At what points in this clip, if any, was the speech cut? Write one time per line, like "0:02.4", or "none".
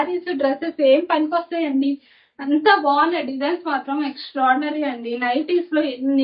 none